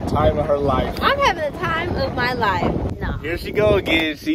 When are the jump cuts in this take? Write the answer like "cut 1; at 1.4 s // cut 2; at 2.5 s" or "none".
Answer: cut 1; at 2.9 s